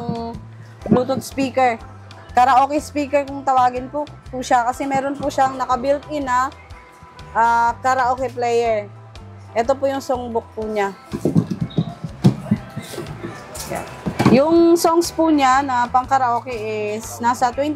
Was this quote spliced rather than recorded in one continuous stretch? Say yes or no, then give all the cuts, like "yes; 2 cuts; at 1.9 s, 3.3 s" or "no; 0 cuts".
no; 0 cuts